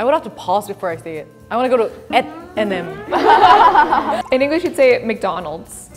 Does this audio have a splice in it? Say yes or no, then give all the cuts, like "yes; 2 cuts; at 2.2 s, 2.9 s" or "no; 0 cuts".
no; 0 cuts